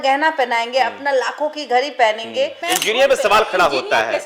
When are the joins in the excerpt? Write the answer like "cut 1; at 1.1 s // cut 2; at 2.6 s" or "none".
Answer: cut 1; at 2.6 s